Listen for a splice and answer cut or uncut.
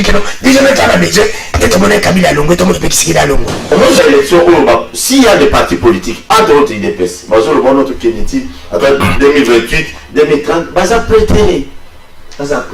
cut